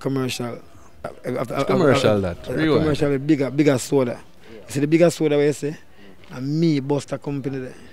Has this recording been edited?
yes; 1 cut; at 1.2 s

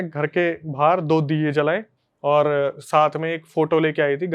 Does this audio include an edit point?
yes; 1 cut; at 1.9 s

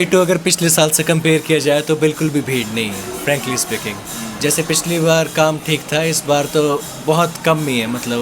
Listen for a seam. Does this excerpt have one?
no; 0 cuts

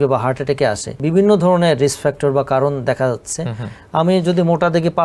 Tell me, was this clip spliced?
yes; 1 cut; at 1.0 s

